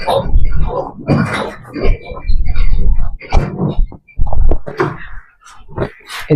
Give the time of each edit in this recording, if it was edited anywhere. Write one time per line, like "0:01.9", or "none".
none